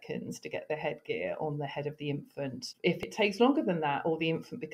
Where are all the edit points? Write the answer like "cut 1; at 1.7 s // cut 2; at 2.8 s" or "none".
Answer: cut 1; at 3.0 s